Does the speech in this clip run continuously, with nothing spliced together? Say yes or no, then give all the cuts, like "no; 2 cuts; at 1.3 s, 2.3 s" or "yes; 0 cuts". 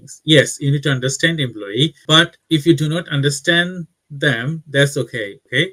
yes; 0 cuts